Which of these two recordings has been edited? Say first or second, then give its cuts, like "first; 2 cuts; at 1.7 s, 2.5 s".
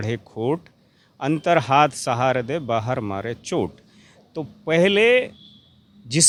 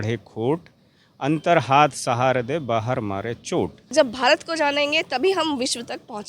second; 1 cut; at 3.8 s